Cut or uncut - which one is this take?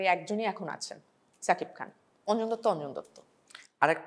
uncut